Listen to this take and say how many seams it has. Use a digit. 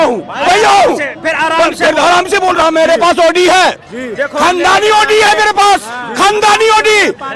1